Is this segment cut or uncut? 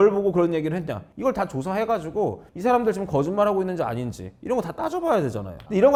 uncut